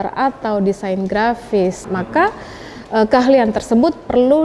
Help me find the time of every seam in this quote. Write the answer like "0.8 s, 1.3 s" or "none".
1.9 s